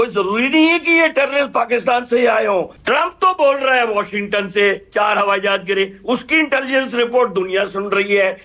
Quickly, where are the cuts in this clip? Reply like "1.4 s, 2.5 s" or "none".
2.8 s